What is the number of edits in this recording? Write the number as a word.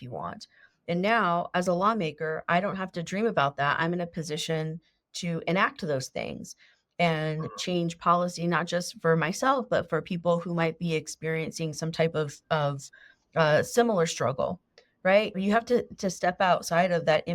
one